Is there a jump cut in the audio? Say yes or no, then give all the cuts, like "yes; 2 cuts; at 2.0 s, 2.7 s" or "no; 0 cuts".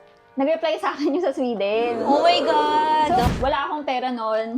yes; 1 cut; at 3.3 s